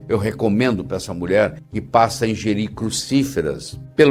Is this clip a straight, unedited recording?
yes; 0 cuts

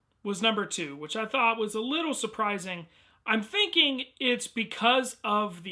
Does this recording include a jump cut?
no; 0 cuts

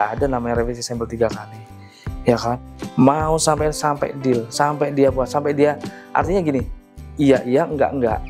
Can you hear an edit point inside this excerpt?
no; 0 cuts

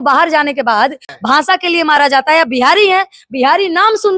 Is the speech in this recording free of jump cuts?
no; 1 cut; at 1.1 s

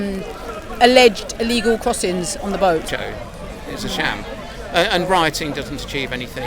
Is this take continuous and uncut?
no; 1 cut; at 2.9 s

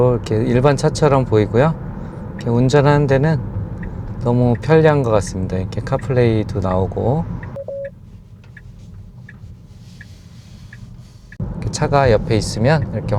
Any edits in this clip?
yes; 1 cut; at 7.6 s

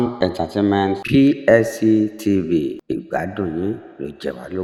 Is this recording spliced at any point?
no; 0 cuts

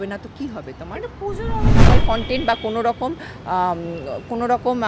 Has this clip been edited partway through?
yes; 1 cut; at 1.8 s

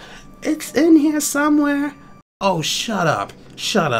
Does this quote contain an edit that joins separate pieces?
yes; 1 cut; at 2.1 s

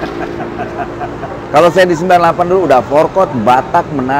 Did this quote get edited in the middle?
no; 0 cuts

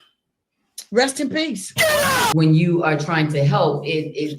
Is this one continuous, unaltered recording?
no; 1 cut; at 2.3 s

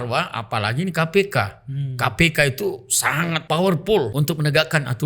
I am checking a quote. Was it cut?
yes; 2 cuts; at 3.4 s, 4.1 s

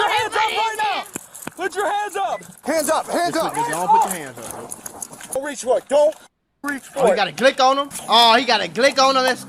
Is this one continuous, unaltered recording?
no; 3 cuts; at 2.5 s, 5.3 s, 7.9 s

